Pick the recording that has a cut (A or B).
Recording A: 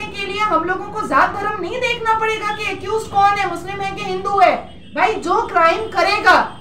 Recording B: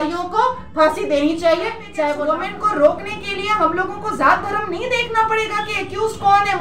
B